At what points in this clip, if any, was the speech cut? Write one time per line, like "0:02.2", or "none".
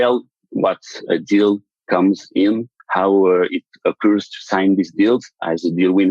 0:01.0